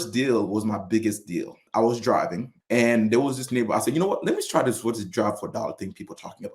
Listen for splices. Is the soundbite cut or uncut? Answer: cut